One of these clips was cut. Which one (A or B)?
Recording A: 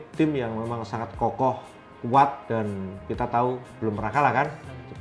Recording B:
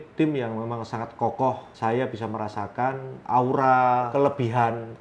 B